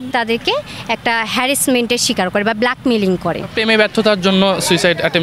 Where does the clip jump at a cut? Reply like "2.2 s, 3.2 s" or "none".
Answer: 3.5 s